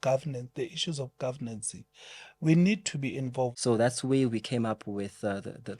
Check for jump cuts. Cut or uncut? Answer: cut